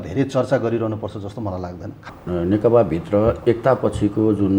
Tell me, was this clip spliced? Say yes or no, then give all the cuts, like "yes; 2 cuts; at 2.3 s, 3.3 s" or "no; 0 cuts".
yes; 1 cut; at 2.0 s